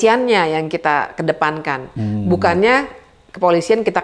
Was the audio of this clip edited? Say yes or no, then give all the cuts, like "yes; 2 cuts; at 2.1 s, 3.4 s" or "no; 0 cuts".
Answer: no; 0 cuts